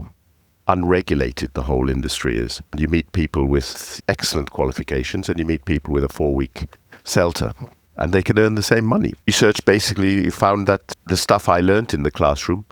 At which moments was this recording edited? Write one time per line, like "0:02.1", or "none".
0:02.8
0:09.3
0:11.0